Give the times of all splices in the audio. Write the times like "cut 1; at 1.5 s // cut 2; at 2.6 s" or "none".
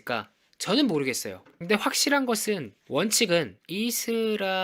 none